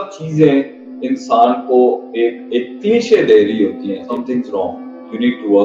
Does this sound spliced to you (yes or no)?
yes